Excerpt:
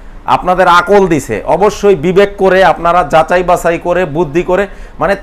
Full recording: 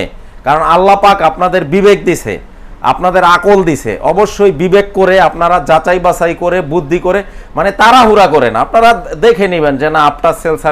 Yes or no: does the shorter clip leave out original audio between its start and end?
no